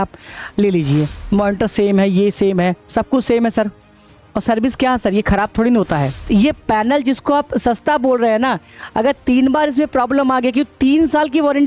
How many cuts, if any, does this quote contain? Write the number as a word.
two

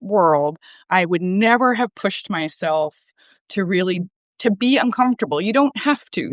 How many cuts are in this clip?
zero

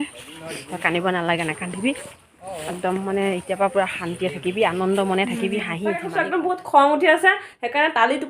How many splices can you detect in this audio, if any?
one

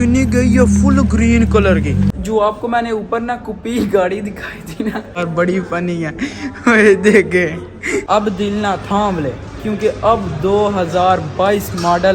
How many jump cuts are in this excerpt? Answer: three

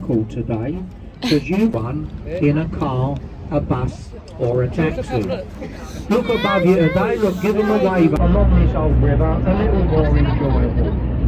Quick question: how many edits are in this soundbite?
two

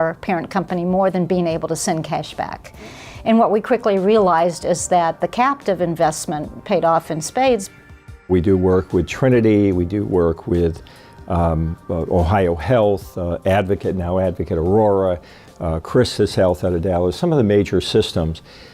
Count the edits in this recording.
one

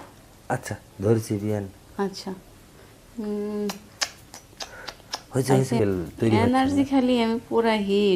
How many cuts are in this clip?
one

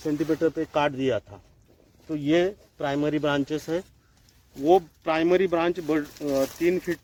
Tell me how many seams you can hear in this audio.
zero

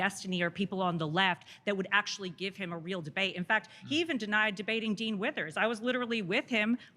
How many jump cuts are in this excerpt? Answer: zero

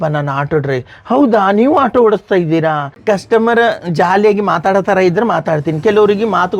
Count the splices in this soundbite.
one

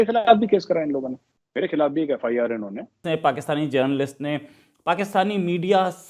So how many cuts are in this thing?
one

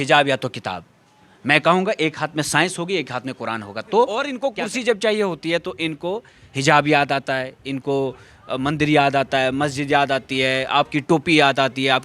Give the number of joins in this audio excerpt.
one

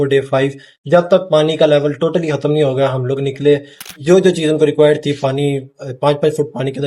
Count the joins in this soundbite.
one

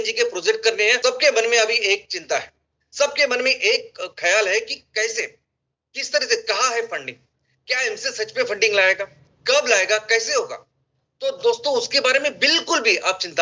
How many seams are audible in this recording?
one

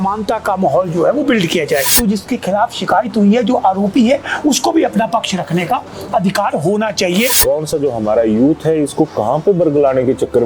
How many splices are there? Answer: two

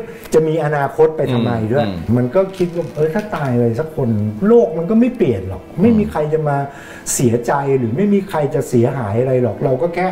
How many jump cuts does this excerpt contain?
one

